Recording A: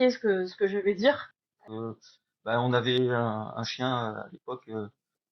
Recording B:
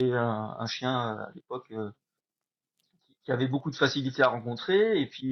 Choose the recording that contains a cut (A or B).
A